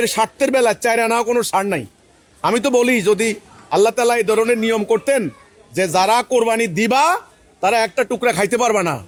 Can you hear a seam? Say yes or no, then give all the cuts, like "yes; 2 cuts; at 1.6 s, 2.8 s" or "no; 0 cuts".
no; 0 cuts